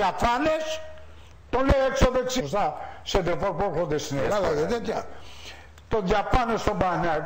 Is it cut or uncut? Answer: uncut